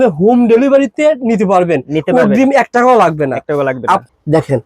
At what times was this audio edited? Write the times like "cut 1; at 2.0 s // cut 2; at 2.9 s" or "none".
cut 1; at 3.6 s

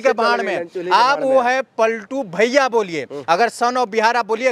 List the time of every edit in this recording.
none

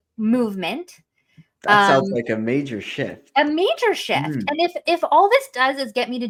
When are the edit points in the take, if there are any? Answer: none

